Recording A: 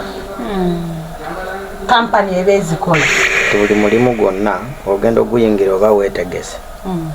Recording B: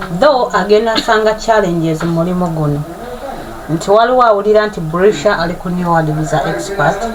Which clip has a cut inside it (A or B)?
A